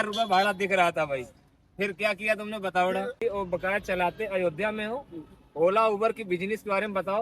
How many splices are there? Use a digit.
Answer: 1